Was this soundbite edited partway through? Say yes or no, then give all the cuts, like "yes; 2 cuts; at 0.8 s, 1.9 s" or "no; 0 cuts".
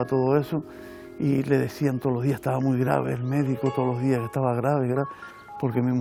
no; 0 cuts